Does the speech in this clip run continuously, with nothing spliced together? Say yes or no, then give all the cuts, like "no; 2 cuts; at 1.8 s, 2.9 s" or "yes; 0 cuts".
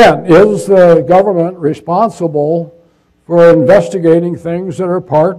no; 1 cut; at 1.2 s